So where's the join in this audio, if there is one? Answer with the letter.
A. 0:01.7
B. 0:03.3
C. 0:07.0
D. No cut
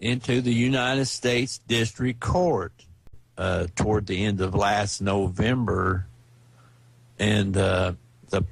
B